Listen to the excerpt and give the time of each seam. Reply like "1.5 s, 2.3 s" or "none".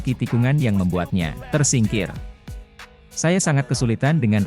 1.4 s